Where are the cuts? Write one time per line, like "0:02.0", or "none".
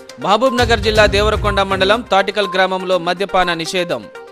none